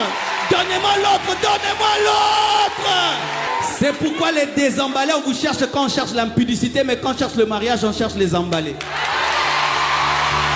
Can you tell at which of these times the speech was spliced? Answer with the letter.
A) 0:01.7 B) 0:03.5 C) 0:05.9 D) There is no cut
B